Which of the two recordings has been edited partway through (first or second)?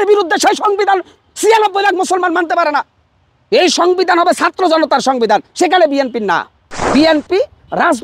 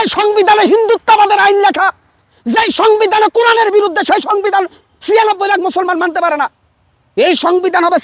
first